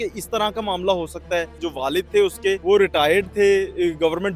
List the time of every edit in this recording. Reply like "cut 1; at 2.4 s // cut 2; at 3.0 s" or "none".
cut 1; at 1.6 s // cut 2; at 2.6 s